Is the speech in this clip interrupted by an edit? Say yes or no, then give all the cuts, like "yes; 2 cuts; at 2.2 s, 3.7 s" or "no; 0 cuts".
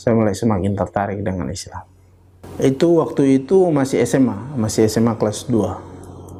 no; 0 cuts